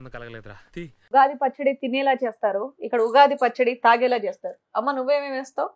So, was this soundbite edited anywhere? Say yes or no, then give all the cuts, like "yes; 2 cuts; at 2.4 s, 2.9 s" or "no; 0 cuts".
yes; 1 cut; at 1.1 s